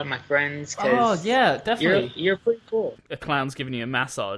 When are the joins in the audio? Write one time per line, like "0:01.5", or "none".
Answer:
0:03.1